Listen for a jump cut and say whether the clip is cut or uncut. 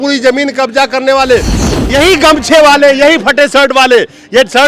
cut